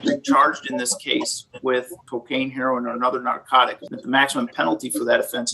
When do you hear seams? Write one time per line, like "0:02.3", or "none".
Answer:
0:02.0
0:03.8